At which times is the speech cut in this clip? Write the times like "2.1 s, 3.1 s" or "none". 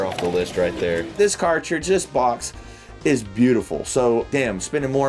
none